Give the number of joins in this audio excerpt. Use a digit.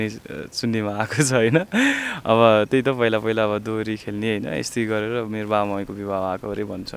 0